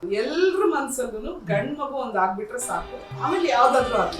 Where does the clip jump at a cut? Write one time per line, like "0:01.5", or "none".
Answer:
0:03.0

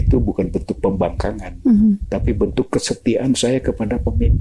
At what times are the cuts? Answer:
none

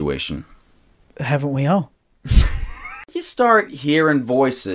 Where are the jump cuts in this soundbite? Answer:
0:03.1

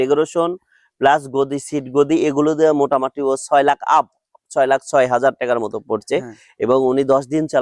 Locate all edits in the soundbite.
none

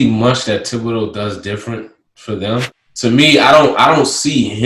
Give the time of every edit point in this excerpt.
0:02.8

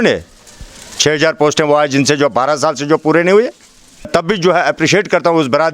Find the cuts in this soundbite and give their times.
0:04.1

